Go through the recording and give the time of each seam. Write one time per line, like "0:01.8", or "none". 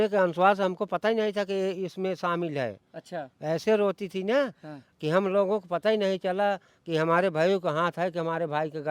none

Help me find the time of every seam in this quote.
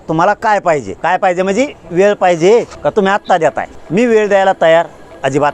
0:00.9
0:02.7
0:03.7

